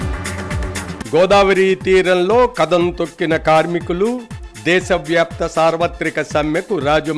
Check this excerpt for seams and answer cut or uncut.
cut